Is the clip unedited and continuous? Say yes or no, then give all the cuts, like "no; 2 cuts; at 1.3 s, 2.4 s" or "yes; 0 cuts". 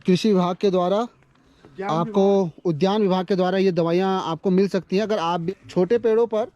no; 1 cut; at 5.4 s